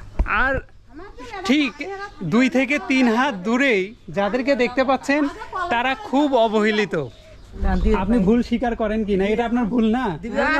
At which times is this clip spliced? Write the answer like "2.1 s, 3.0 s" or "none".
7.6 s